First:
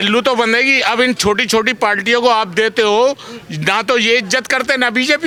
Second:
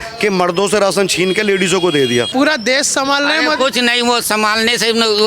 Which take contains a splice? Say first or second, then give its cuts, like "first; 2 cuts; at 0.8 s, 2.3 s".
second; 1 cut; at 2.3 s